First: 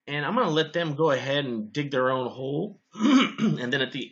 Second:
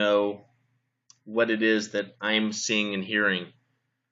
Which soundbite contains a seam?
first; 1 cut; at 1.0 s

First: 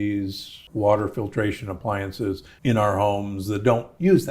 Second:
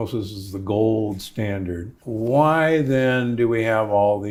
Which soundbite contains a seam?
first; 1 cut; at 2.5 s

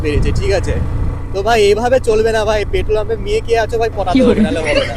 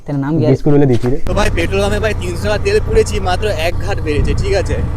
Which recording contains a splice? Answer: second; 1 cut; at 1.2 s

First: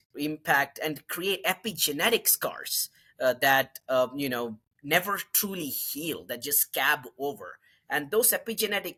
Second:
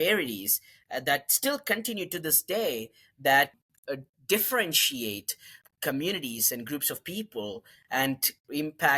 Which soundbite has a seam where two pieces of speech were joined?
second; 2 cuts; at 3.5 s, 5.6 s

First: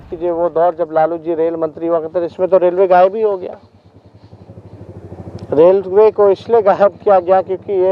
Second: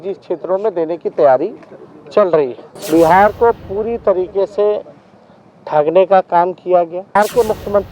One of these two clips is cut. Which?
second; 2 cuts; at 2.7 s, 7.0 s

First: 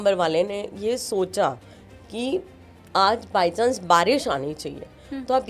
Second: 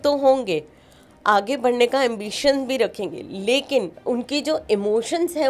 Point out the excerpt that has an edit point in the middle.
second; 1 cut; at 3.9 s

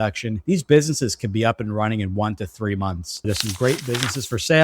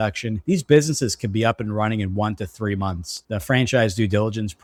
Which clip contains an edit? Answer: first; 1 cut; at 3.3 s

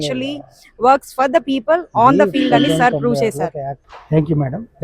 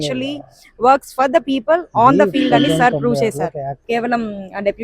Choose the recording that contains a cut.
second; 1 cut; at 3.7 s

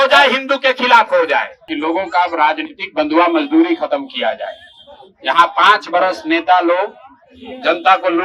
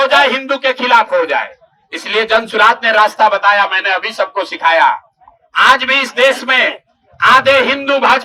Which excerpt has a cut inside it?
first; 1 cut; at 1.7 s

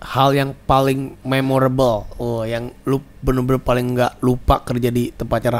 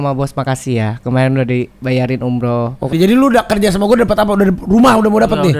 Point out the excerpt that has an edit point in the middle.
second; 1 cut; at 2.9 s

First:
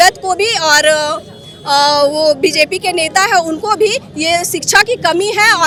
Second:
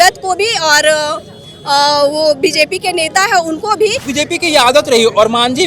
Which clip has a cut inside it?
second; 1 cut; at 4.1 s

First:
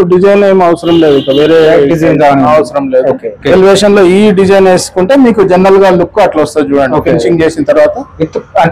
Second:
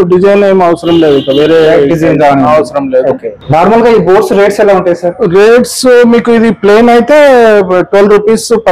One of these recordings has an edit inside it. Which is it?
first; 1 cut; at 3.3 s

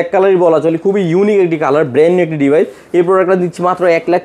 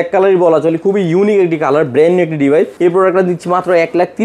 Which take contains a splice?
second; 1 cut; at 2.7 s

